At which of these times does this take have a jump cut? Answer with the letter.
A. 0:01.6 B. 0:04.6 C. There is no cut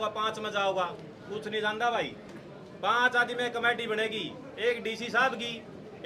C